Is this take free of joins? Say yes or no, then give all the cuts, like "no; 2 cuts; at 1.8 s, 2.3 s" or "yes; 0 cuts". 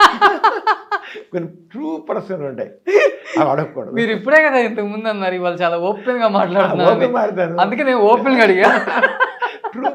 yes; 0 cuts